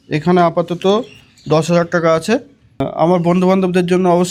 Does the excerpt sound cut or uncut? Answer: uncut